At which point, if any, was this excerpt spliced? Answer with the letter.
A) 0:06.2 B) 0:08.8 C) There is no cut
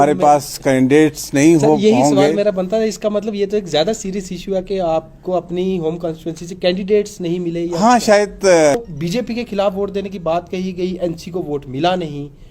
B